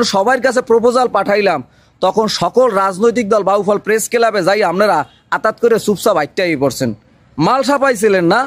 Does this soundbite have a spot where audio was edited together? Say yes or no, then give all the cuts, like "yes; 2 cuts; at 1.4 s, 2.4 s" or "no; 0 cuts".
no; 0 cuts